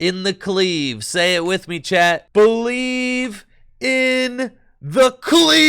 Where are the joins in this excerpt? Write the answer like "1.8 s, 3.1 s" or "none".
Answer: 2.2 s

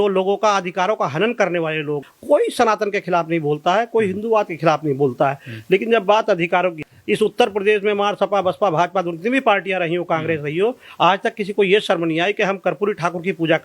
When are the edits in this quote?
2.0 s, 6.9 s

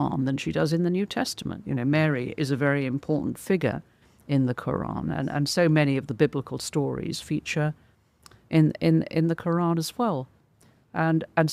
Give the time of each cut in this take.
none

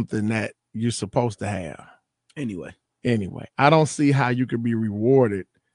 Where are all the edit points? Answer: none

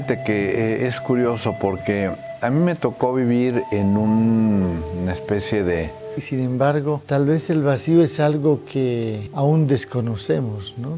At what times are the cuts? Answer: 6.2 s

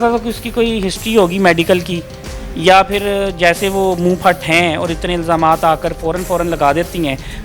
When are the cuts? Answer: none

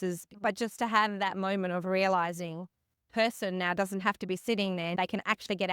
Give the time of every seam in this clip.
3.1 s

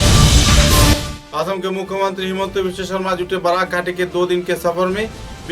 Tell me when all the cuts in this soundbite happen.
1.0 s

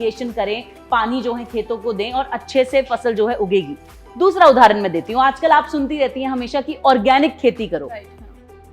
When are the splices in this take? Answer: none

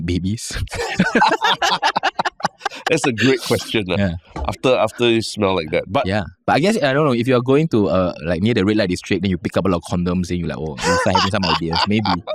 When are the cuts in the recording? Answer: none

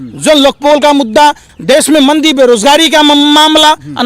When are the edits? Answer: 1.5 s

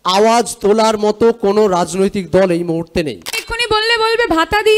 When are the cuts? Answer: 3.5 s

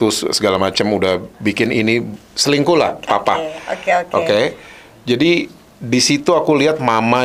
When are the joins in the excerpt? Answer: none

